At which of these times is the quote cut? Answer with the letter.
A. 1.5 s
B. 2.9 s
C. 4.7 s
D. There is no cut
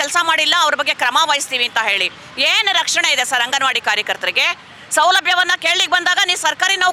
D